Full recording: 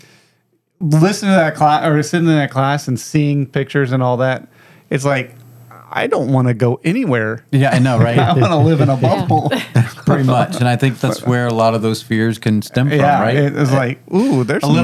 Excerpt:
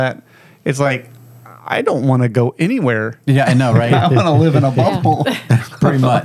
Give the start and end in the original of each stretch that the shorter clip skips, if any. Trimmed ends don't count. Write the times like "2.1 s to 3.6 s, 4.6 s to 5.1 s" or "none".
none